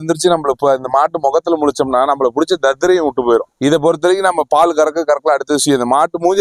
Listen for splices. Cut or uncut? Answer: uncut